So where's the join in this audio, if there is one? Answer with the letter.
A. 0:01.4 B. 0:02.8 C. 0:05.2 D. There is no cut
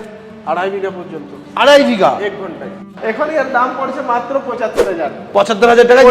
B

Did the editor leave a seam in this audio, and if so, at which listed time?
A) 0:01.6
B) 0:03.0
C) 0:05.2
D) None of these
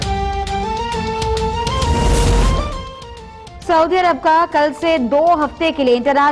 A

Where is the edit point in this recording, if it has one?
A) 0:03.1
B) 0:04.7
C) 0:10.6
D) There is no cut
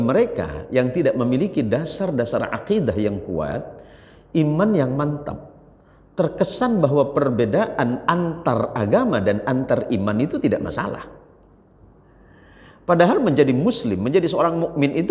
D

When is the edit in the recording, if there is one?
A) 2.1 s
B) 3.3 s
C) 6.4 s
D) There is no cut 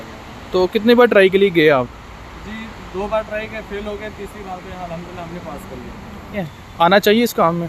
C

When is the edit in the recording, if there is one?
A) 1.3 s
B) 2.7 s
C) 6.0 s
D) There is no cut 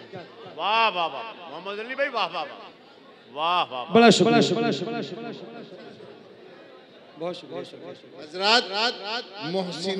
B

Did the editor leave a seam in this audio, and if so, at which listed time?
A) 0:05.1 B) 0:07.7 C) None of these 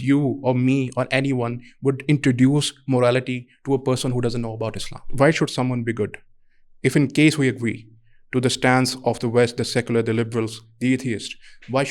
A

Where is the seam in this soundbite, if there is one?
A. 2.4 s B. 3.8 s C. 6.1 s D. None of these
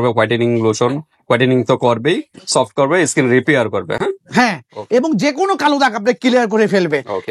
D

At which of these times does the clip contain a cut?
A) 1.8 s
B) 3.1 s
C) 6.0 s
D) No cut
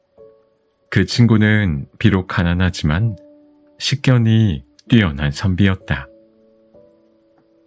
C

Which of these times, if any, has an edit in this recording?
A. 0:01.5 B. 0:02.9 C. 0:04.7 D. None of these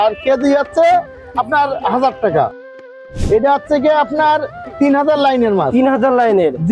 B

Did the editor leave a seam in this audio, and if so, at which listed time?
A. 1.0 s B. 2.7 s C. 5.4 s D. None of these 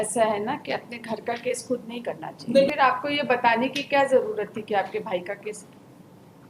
B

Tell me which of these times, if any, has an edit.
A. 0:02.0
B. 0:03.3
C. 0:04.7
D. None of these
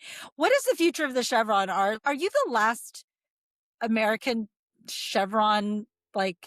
A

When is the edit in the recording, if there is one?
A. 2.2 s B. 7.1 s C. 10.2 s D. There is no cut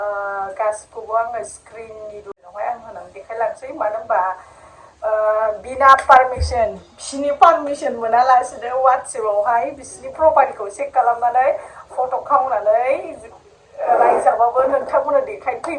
A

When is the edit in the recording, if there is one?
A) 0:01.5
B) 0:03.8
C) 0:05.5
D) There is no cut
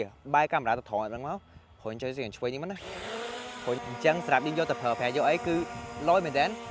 B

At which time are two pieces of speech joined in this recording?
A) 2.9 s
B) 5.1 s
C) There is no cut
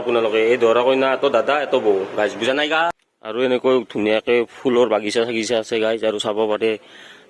A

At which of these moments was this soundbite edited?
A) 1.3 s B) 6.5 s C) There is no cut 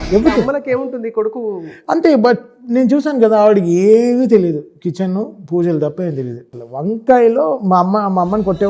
B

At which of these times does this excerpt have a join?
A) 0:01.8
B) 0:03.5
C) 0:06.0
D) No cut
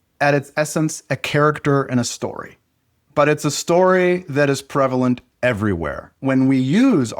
C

